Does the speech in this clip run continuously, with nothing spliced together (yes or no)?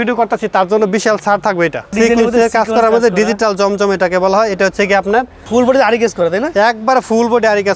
no